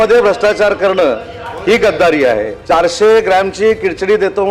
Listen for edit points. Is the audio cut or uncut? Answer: cut